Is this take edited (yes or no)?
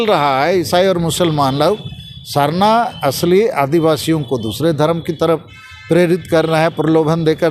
no